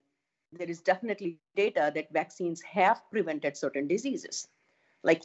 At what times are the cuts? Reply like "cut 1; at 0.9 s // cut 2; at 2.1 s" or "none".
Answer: none